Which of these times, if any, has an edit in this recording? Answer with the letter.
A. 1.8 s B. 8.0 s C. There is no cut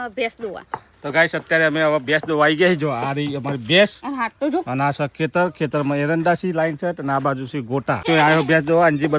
B